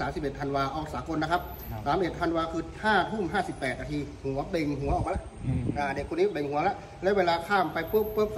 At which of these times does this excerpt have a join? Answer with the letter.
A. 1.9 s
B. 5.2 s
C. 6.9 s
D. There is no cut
D